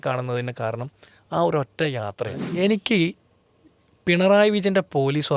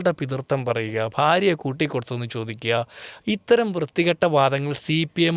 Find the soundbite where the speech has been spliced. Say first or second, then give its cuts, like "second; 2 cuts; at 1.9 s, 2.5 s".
first; 1 cut; at 2.4 s